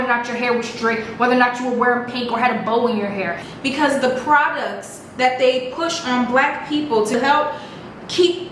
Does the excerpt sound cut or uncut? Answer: cut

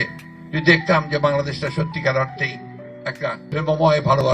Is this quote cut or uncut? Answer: cut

